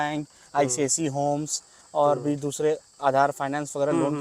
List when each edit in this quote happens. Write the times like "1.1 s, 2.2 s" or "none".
none

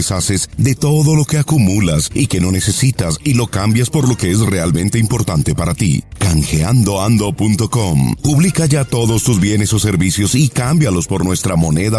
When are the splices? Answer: none

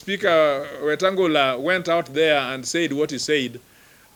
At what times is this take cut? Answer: none

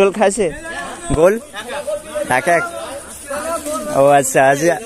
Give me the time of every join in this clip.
none

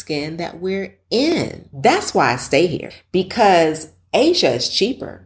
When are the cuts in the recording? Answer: 1.6 s, 2.9 s

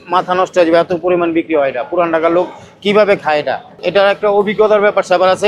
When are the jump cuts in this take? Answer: 3.7 s

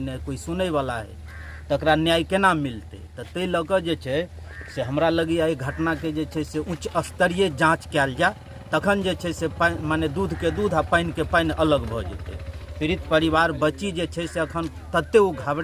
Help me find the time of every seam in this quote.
none

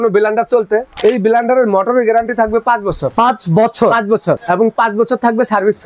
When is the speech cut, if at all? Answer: 0.9 s, 3.0 s, 4.4 s

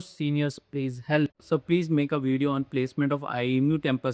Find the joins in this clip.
1.5 s

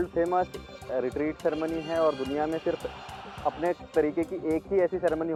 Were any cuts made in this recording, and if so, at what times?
none

